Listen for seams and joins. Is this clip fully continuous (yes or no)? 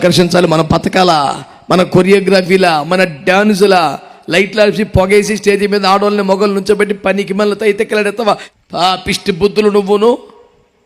no